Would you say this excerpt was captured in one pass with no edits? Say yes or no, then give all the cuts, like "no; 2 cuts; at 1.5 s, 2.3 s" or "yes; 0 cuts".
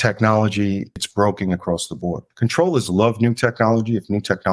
no; 2 cuts; at 1.0 s, 2.2 s